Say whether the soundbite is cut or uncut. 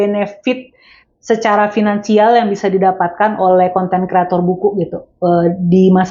uncut